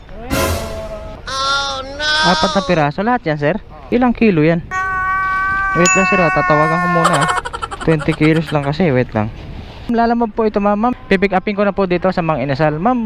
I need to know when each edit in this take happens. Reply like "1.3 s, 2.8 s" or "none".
1.1 s, 3.7 s, 9.9 s

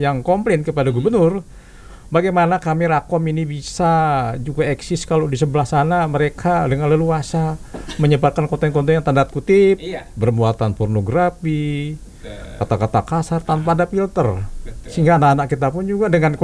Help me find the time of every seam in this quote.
none

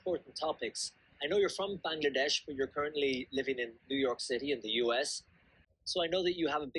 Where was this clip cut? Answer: 5.6 s

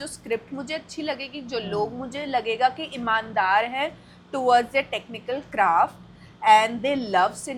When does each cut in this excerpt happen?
none

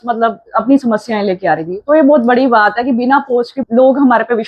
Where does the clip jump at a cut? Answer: 3.6 s

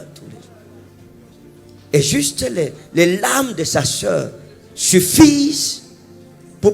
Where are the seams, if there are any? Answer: 0.9 s

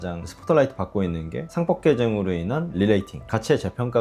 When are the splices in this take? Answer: 2.7 s

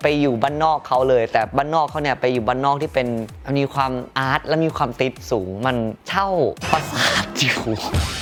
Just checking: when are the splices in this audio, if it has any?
none

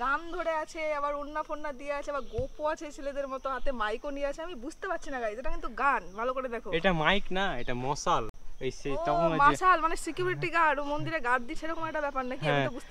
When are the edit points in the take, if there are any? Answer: none

